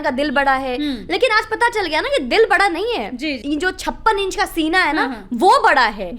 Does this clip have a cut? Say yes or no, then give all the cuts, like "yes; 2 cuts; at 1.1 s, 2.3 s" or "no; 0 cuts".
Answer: yes; 1 cut; at 3.4 s